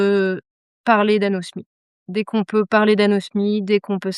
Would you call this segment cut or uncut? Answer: uncut